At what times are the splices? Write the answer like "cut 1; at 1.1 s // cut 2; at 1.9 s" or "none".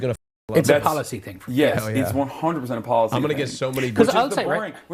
none